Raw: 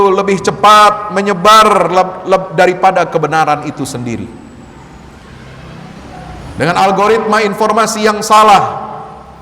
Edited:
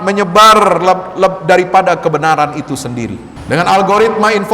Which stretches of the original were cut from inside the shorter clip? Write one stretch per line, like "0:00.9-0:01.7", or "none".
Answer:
0:04.4-0:06.4